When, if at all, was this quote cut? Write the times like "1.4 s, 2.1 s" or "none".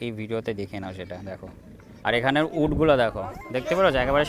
2.1 s